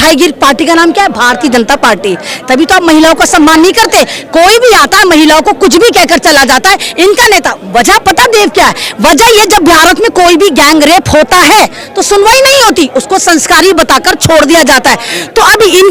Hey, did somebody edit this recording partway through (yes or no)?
no